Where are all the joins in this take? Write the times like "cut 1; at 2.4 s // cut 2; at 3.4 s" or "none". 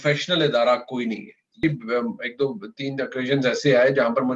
cut 1; at 1.6 s